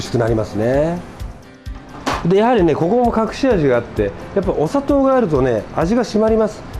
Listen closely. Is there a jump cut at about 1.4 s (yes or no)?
yes